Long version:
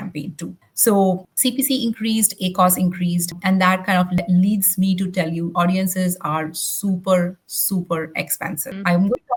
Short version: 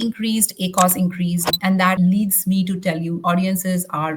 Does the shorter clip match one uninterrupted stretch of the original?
no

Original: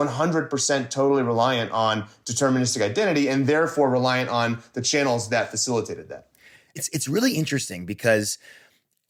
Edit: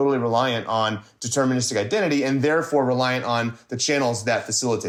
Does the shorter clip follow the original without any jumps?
yes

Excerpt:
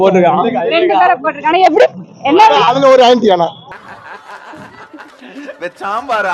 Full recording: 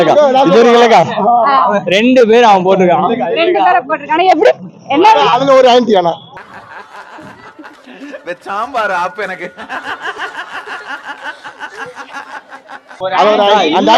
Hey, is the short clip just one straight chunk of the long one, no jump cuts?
yes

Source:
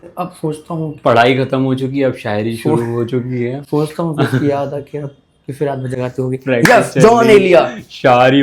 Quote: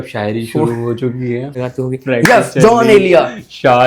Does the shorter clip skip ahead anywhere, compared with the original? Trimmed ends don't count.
yes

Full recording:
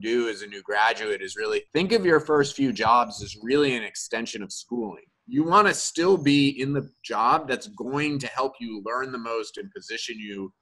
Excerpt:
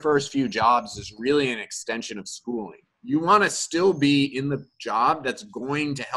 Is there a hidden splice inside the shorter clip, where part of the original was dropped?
no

